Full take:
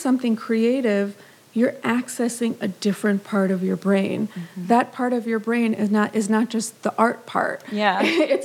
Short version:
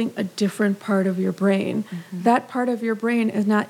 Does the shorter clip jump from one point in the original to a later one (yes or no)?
no